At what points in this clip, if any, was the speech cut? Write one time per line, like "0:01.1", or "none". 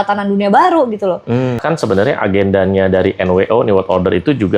0:01.6